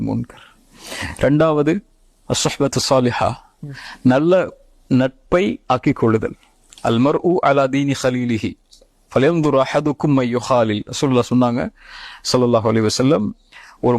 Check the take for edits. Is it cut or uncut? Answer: cut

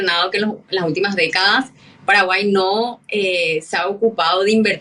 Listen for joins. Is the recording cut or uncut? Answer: uncut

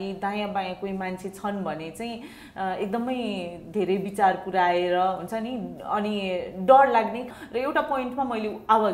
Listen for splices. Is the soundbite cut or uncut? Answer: cut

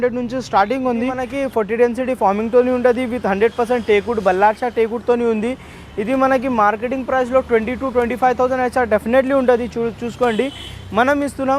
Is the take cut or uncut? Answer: cut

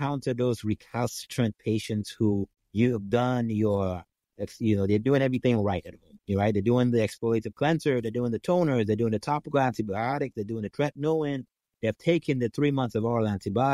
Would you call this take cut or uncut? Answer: cut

